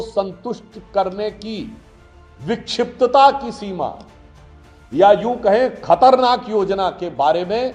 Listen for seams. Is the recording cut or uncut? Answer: uncut